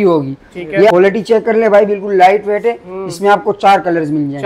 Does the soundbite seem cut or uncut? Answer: cut